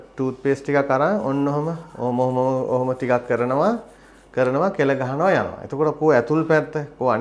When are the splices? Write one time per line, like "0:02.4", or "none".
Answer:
none